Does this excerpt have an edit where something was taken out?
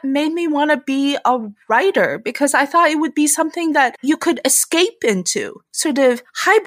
yes; 2 cuts; at 4.0 s, 5.6 s

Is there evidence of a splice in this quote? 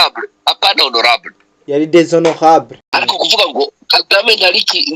yes; 1 cut; at 2.9 s

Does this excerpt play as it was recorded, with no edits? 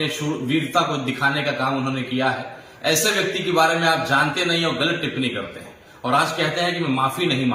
yes; 0 cuts

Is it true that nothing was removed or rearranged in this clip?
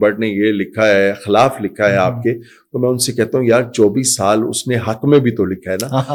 yes; 0 cuts

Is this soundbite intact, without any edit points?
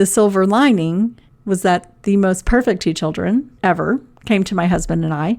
no; 2 cuts; at 1.3 s, 3.5 s

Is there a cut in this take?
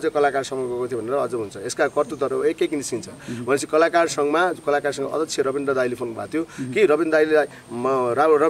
no; 0 cuts

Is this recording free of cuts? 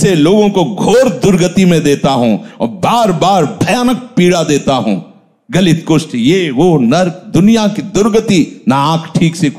yes; 0 cuts

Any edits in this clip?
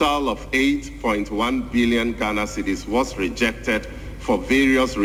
no; 0 cuts

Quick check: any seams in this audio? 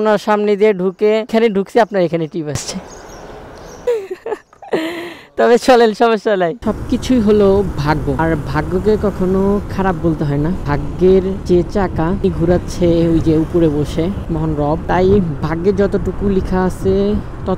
no; 0 cuts

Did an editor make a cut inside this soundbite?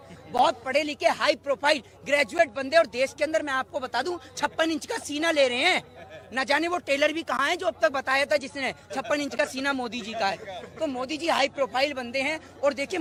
no; 0 cuts

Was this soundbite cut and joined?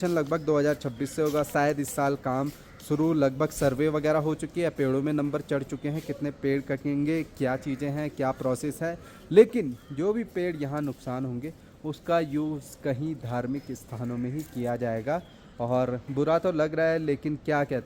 no; 0 cuts

